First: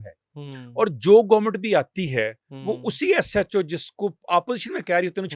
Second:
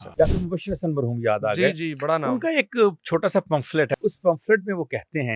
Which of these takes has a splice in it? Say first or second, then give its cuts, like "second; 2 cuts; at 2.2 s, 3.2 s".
second; 1 cut; at 3.9 s